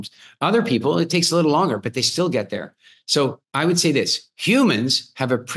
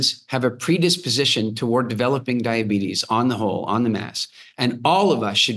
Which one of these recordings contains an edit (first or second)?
first